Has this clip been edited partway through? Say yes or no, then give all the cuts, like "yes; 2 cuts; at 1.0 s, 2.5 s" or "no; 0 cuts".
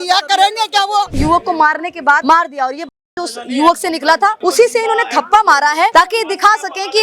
yes; 4 cuts; at 1.1 s, 2.2 s, 4.4 s, 5.9 s